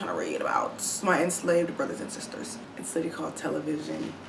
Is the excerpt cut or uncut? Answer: cut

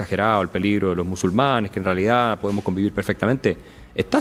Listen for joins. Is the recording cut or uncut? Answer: uncut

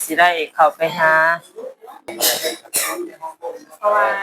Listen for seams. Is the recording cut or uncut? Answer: cut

